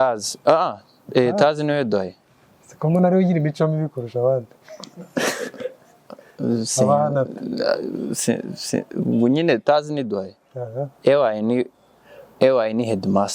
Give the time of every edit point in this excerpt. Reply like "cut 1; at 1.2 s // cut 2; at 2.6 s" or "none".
none